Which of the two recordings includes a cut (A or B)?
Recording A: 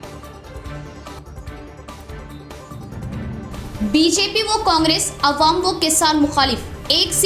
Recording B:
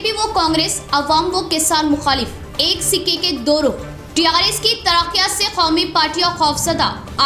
A